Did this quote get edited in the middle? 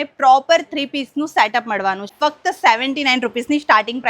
yes; 1 cut; at 2.1 s

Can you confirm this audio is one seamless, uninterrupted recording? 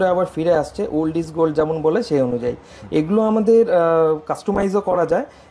yes; 0 cuts

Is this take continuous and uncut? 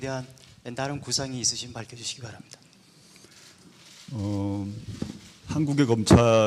no; 1 cut; at 3.9 s

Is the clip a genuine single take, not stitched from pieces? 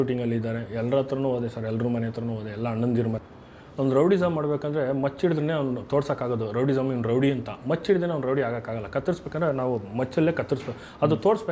no; 1 cut; at 3.2 s

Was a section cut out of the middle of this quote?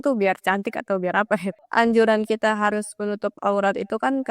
yes; 1 cut; at 1.6 s

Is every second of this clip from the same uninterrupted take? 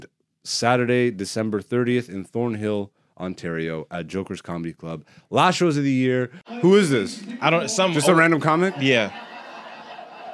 no; 1 cut; at 6.4 s

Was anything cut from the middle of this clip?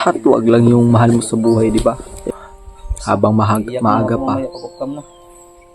yes; 1 cut; at 2.2 s

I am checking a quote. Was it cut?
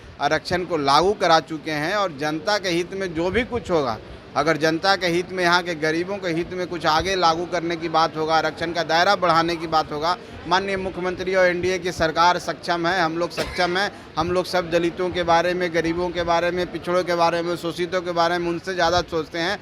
no; 0 cuts

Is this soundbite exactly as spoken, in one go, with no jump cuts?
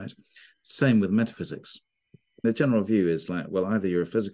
no; 1 cut; at 2.4 s

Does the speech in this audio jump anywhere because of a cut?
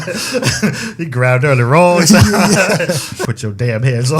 yes; 1 cut; at 3.3 s

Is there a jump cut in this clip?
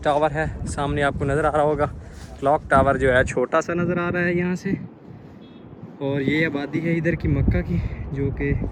no; 0 cuts

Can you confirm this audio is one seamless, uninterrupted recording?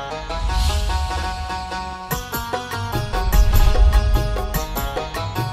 no; 1 cut; at 4.4 s

